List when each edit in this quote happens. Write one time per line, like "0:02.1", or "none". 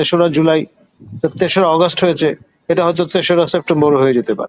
none